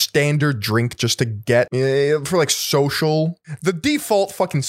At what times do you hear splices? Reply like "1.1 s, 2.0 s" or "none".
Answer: 1.7 s, 3.5 s